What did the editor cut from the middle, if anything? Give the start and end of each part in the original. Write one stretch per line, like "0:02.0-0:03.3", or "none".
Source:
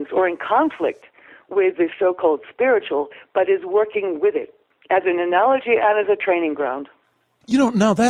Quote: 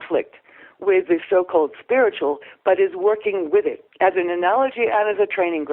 0:04.5-0:04.7